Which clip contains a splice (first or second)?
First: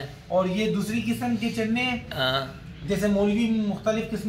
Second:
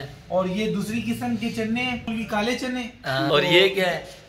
second